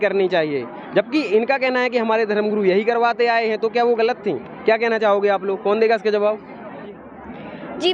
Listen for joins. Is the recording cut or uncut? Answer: uncut